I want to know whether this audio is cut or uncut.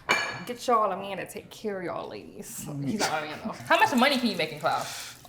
cut